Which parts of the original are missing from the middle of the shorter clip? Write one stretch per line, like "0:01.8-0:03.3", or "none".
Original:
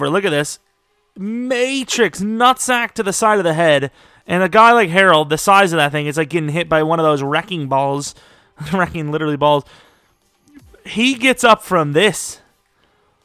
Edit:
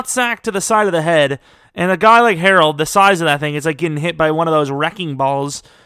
none